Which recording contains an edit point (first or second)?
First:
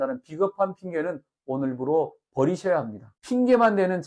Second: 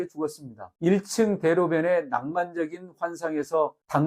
first